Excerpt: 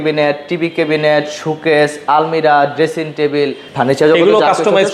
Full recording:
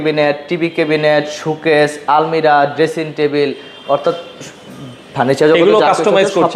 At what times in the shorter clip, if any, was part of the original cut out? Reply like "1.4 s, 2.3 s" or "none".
3.6 s